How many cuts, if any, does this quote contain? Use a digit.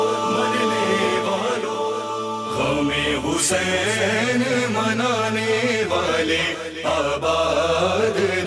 0